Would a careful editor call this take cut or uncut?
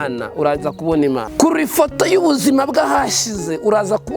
cut